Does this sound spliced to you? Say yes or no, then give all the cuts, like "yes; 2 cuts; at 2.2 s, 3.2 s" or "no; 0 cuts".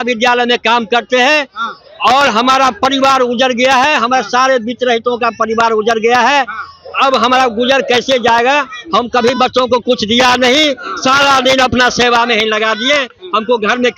no; 0 cuts